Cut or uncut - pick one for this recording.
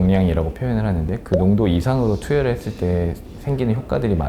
uncut